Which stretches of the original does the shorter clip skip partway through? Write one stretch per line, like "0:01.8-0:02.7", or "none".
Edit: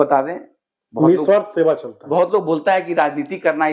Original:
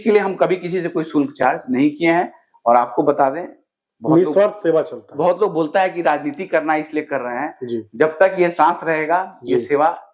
none